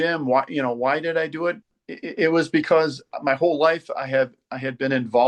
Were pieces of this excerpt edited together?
no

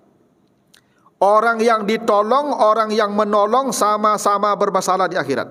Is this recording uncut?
yes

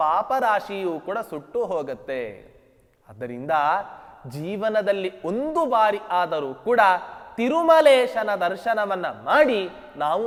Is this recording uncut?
yes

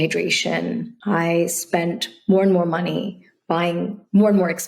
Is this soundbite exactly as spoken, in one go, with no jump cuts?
no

